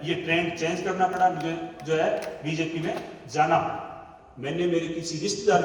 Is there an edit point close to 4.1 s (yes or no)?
yes